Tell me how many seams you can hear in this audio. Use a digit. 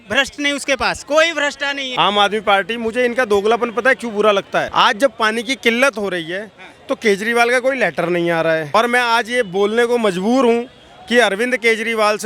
3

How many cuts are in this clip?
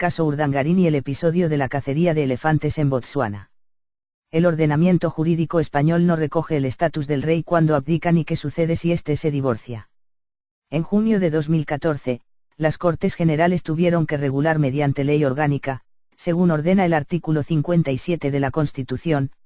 0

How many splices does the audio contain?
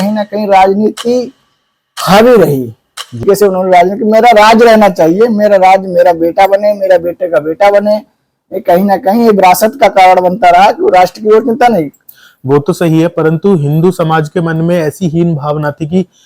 1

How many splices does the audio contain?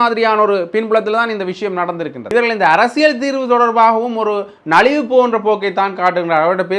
1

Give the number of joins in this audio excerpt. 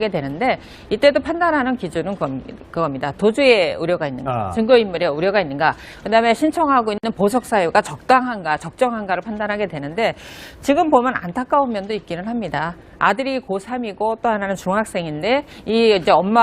0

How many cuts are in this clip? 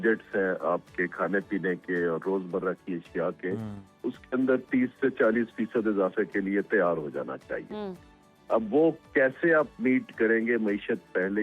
0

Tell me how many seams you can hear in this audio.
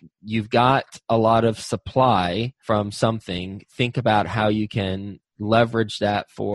1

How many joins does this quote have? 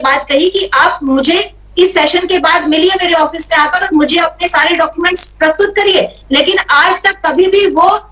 0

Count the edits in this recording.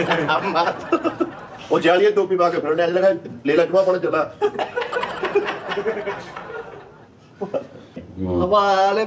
1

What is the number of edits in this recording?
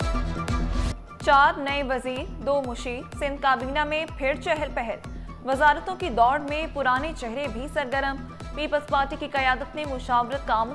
1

